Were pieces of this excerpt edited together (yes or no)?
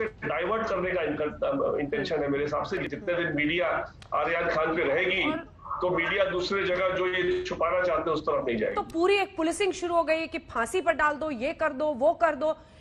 yes